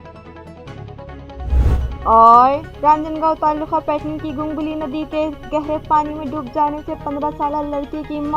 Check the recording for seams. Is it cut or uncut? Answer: uncut